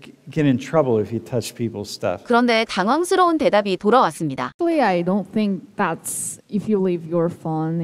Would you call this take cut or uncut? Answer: uncut